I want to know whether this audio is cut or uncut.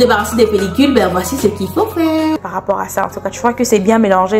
cut